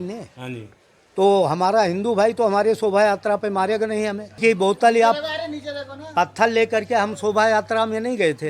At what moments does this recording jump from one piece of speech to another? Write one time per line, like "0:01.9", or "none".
0:04.3